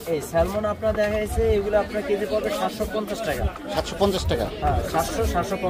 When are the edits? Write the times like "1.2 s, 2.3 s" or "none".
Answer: none